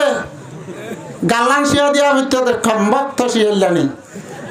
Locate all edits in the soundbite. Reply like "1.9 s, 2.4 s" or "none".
none